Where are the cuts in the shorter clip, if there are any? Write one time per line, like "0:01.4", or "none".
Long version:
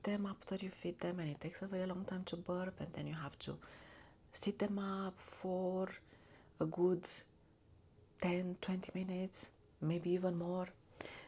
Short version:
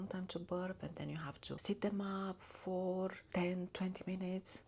0:01.6
0:03.2